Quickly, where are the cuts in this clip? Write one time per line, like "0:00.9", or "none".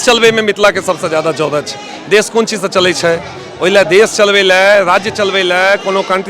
none